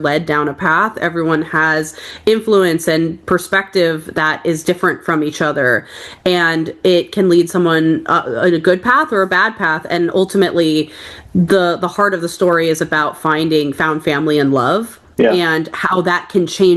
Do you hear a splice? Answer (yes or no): no